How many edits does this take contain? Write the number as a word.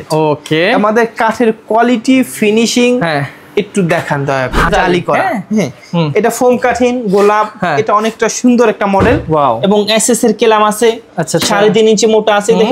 one